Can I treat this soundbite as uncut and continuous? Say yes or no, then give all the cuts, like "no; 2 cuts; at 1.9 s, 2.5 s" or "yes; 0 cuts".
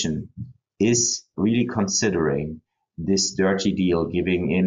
no; 1 cut; at 1.3 s